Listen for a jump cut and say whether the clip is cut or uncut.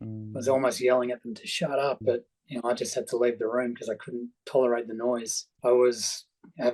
cut